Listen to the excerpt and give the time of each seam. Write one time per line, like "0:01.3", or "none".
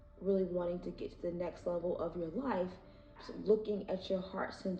0:03.3